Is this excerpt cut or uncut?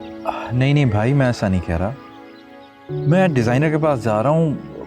uncut